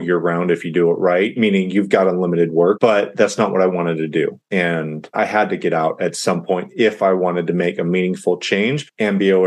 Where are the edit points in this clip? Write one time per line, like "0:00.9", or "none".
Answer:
0:01.3
0:02.8